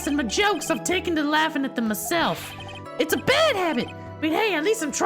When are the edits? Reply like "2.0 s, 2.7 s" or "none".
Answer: none